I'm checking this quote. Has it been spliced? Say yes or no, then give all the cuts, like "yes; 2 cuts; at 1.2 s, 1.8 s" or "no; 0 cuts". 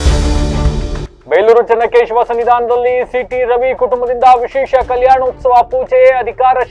no; 0 cuts